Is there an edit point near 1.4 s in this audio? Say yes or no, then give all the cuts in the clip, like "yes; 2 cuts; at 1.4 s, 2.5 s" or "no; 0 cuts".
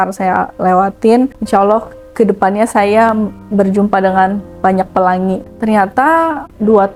no; 0 cuts